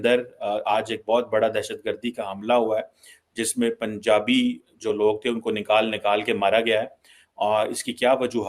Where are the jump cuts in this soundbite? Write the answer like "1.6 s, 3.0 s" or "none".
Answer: none